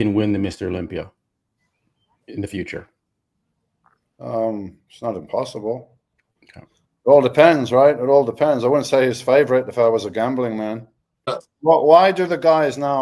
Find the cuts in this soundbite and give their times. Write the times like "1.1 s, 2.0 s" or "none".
11.3 s